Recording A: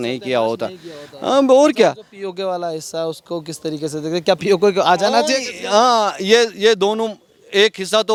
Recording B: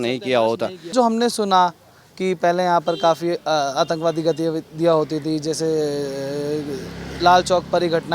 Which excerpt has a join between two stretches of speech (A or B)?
B